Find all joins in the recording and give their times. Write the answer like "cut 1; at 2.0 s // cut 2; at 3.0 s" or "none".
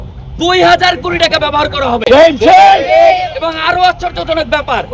none